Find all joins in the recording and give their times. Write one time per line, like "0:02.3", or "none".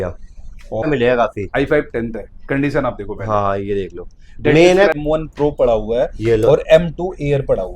0:00.9
0:04.9